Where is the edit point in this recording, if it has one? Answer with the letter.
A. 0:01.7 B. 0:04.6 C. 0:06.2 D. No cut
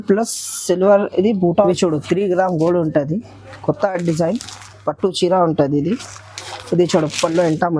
A